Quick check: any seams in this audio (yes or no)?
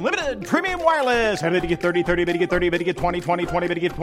no